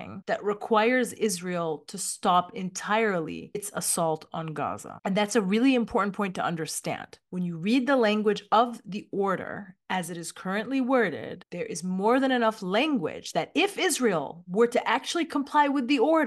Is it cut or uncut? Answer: uncut